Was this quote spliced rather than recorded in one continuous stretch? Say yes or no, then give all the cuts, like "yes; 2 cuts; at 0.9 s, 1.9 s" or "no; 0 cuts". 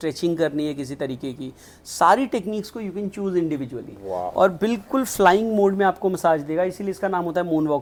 no; 0 cuts